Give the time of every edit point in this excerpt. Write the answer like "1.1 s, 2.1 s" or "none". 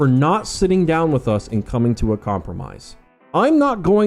3.2 s